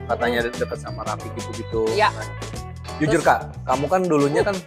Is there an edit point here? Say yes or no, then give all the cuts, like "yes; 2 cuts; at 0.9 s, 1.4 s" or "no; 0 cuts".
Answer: no; 0 cuts